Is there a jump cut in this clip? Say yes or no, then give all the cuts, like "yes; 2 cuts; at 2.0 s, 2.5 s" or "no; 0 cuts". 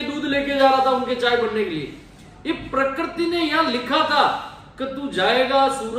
no; 0 cuts